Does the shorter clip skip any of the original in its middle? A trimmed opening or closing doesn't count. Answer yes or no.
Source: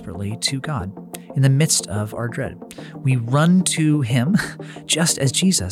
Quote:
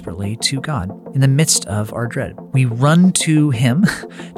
yes